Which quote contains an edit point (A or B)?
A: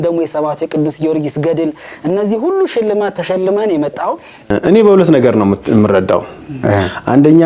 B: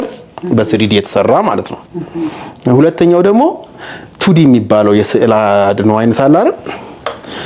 A